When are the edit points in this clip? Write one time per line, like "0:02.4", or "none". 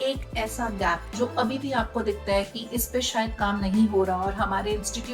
none

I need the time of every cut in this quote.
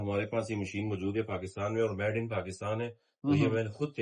none

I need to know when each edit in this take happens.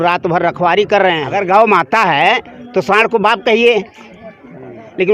0:01.3

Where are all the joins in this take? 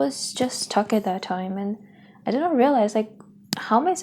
none

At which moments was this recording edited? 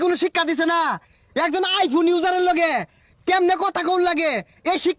none

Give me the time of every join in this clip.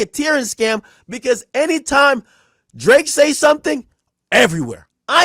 none

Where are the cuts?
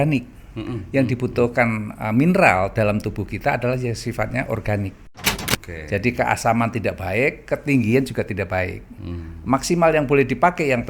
0:05.4

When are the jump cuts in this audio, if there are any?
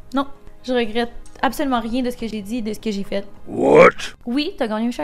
0:04.1

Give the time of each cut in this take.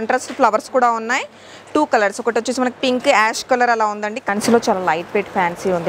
0:04.3

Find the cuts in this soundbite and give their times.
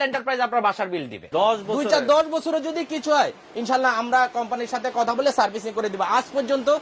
0:01.2

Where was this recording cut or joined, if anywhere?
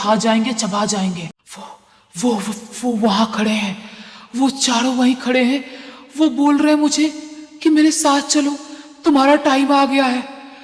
0:01.2

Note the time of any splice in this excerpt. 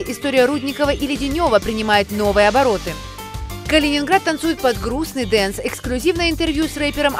none

